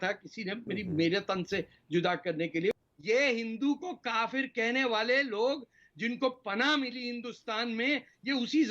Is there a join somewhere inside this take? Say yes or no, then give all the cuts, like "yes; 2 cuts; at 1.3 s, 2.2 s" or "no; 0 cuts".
yes; 1 cut; at 2.8 s